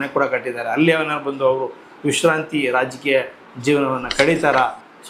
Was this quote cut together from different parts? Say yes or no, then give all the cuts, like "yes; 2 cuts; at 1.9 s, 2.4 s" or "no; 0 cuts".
no; 0 cuts